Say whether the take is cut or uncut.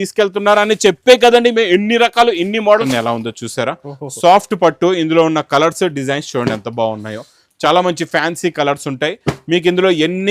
cut